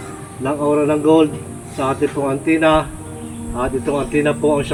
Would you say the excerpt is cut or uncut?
uncut